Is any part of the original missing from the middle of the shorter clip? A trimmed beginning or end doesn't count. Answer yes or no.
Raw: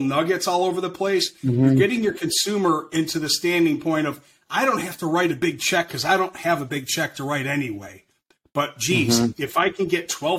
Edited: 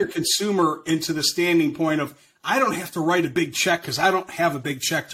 no